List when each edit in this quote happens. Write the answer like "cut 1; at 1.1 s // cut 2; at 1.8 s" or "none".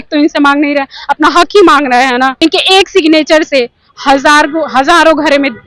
cut 1; at 2.3 s